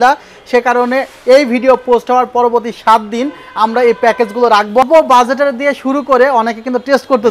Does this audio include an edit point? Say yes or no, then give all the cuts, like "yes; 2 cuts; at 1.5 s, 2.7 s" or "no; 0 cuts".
yes; 1 cut; at 4.8 s